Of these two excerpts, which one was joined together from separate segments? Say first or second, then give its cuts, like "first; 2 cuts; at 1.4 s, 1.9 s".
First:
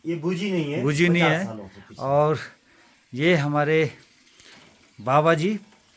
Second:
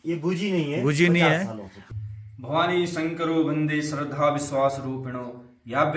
second; 1 cut; at 1.9 s